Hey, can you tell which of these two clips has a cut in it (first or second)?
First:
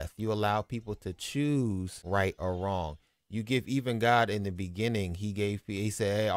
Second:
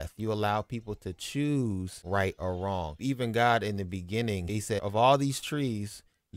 second